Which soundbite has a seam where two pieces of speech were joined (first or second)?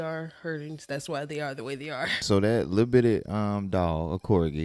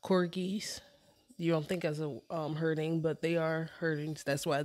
first